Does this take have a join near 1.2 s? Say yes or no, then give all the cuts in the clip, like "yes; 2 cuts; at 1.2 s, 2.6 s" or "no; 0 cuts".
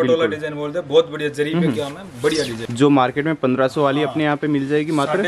no; 1 cut; at 2.6 s